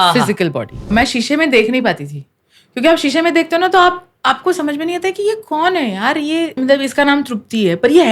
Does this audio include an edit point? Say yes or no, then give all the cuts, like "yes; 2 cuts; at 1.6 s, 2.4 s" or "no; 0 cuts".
yes; 2 cuts; at 0.9 s, 6.5 s